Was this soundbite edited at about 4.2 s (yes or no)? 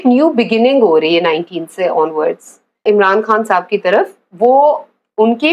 no